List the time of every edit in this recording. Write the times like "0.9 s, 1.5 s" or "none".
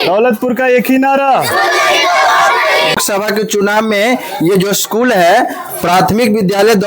3.0 s

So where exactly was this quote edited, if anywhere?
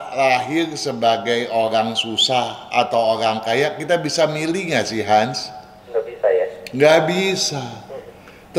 none

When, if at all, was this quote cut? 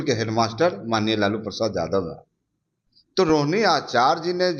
none

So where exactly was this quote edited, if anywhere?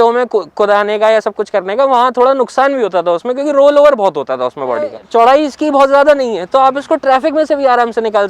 5.0 s

